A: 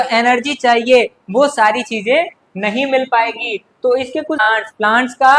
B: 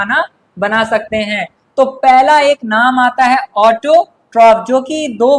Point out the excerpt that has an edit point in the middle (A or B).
A